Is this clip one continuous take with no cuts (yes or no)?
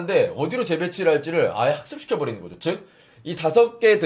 yes